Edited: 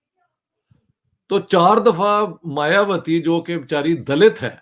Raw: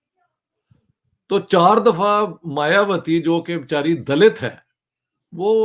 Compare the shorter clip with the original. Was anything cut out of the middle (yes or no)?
no